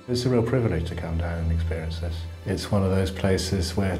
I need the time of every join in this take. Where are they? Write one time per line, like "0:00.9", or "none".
0:02.2